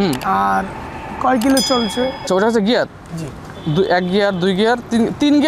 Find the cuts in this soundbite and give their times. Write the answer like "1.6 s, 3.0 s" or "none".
2.2 s